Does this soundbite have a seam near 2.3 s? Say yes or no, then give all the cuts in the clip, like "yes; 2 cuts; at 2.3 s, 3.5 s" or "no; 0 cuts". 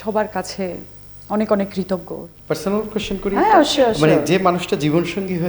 yes; 1 cut; at 2.3 s